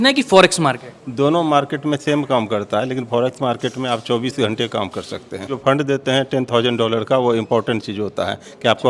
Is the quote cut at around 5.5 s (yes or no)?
yes